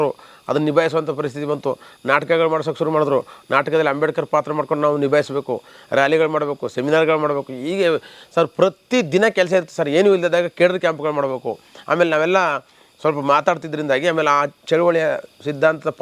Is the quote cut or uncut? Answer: uncut